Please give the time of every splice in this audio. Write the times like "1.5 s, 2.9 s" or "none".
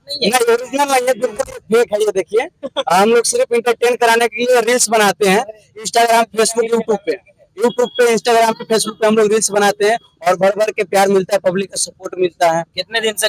none